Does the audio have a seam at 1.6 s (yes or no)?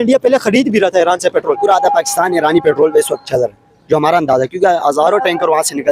yes